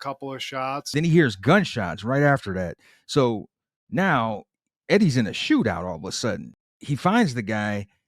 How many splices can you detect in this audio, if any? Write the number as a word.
one